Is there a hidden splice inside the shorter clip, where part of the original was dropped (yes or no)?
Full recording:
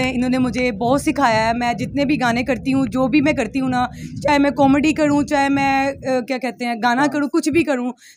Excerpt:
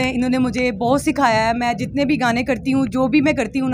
no